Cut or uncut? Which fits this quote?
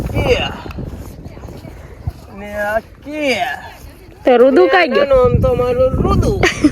uncut